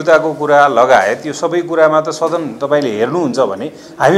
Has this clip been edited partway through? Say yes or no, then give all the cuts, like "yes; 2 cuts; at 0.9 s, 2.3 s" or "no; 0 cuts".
no; 0 cuts